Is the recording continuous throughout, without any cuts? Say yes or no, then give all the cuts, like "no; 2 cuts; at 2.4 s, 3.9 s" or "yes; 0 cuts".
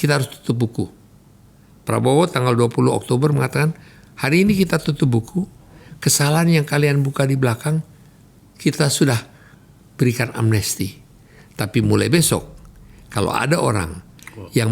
yes; 0 cuts